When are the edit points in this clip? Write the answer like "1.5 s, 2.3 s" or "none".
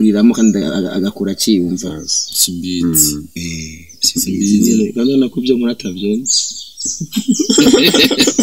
none